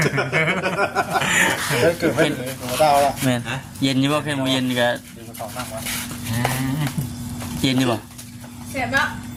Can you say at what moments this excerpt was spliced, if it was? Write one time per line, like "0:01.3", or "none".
none

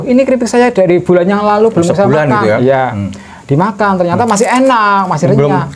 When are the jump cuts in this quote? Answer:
none

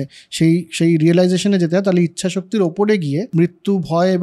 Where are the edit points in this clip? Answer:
0:03.3

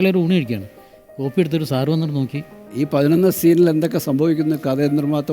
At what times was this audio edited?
0:02.7

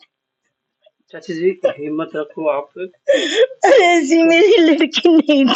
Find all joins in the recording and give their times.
none

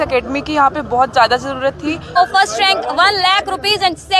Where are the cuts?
0:02.2

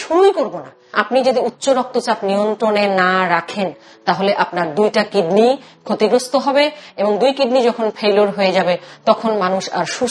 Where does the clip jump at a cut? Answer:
0:01.0

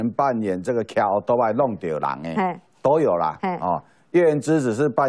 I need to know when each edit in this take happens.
none

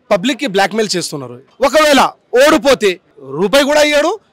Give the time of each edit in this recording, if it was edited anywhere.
0:01.4

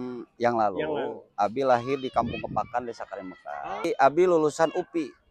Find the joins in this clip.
0:03.8

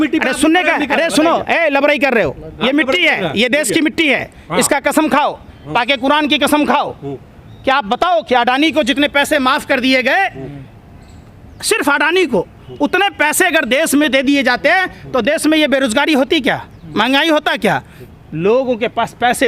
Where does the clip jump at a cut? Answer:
none

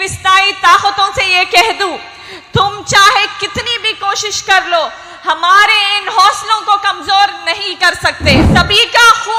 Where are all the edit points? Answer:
0:08.5

